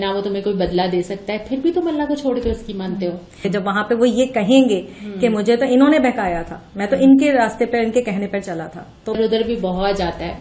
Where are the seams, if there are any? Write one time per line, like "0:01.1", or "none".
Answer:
0:03.4
0:09.2